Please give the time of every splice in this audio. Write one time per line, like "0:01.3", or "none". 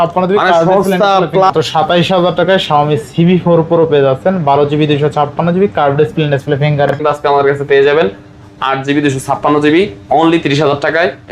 0:01.5
0:07.0